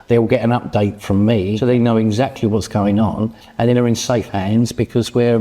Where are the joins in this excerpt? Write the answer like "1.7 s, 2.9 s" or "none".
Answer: 1.6 s